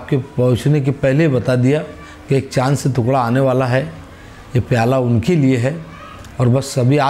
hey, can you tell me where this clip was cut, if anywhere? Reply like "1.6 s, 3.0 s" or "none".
none